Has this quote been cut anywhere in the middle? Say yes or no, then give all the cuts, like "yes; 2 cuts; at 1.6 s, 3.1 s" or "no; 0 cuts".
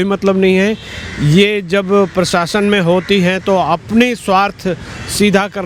no; 0 cuts